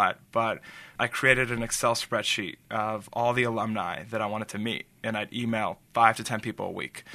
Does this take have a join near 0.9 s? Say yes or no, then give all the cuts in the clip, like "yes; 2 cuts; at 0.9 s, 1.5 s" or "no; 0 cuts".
yes; 1 cut; at 0.9 s